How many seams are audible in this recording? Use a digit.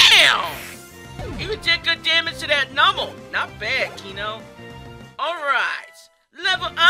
1